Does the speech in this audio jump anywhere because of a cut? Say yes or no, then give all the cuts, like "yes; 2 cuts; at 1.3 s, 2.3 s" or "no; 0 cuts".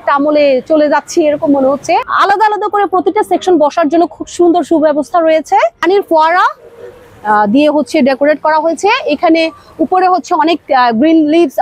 yes; 2 cuts; at 2.1 s, 5.8 s